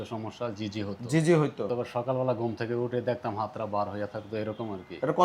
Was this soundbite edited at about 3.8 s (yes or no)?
no